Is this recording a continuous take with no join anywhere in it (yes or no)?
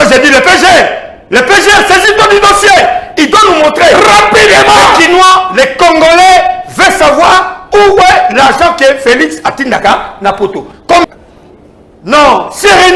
no